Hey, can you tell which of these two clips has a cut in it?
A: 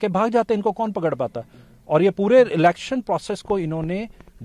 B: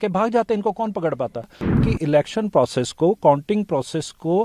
B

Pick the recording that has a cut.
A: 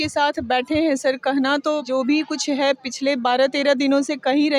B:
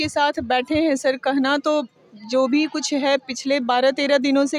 A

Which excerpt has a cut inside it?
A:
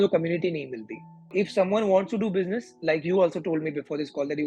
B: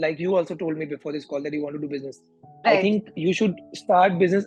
A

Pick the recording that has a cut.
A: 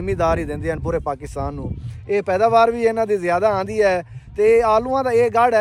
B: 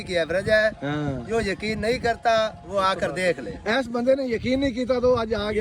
B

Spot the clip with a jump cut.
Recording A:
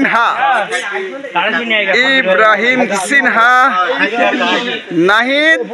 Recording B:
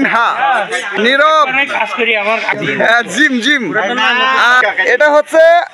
B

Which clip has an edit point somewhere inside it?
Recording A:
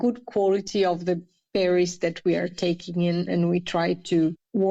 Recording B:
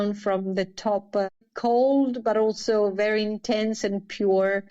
B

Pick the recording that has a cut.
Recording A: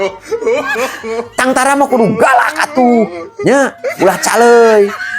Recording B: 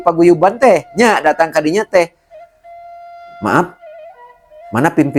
A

